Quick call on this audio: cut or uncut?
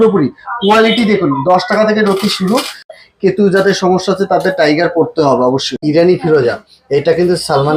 cut